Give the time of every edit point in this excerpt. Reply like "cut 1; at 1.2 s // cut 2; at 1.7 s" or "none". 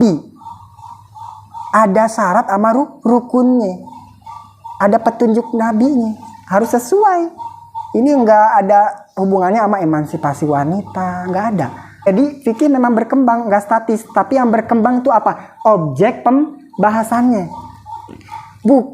cut 1; at 12.1 s